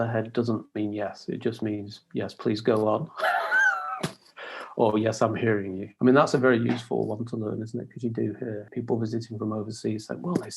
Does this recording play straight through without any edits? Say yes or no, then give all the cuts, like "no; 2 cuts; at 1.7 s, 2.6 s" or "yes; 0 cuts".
no; 2 cuts; at 5.8 s, 8.7 s